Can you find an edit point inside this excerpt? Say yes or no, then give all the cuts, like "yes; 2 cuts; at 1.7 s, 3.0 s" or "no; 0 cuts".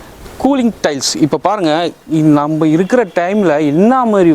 no; 0 cuts